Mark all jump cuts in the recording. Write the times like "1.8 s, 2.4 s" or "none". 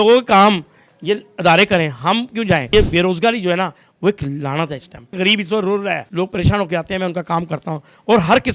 2.7 s, 5.2 s, 6.1 s